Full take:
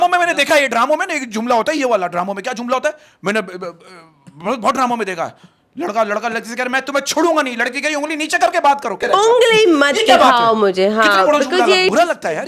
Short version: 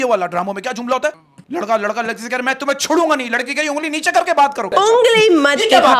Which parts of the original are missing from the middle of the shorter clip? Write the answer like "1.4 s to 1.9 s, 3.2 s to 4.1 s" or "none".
3.1 s to 5.5 s, 8.9 s to 9.0 s